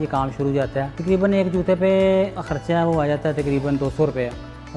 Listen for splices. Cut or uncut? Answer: cut